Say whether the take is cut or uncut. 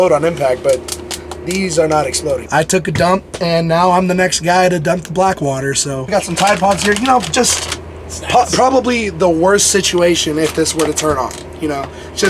cut